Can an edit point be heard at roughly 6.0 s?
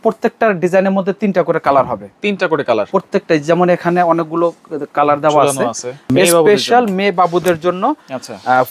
yes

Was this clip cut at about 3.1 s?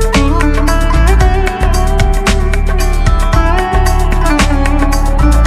no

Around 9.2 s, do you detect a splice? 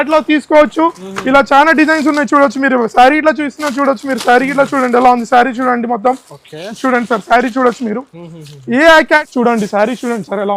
yes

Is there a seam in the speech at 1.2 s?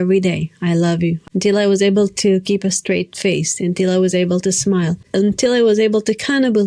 yes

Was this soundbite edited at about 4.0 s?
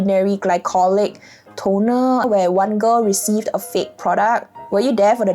no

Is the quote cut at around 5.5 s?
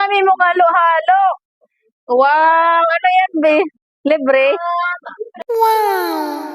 yes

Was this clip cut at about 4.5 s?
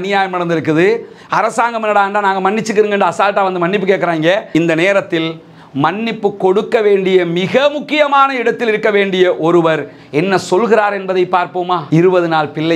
yes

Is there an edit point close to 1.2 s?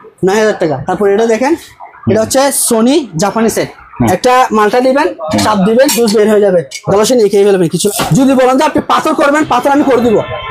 no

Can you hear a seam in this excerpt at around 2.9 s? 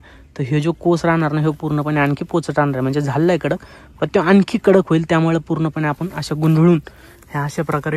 no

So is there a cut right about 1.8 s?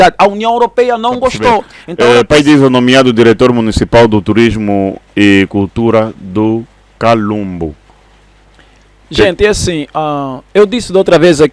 yes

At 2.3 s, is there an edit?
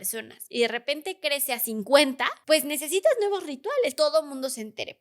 yes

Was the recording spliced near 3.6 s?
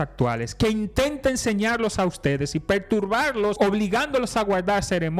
yes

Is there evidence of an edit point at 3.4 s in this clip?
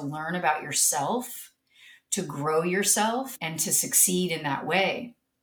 yes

